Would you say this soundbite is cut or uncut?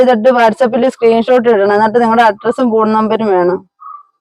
uncut